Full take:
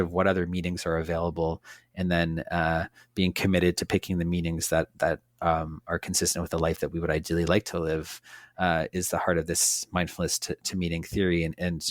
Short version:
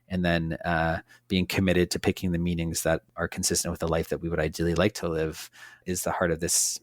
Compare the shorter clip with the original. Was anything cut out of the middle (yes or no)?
yes